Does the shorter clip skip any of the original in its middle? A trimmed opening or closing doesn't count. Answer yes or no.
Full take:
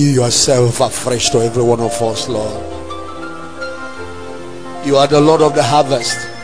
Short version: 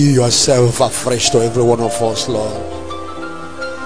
no